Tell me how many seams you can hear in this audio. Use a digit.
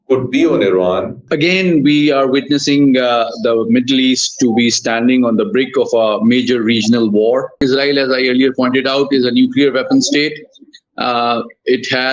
2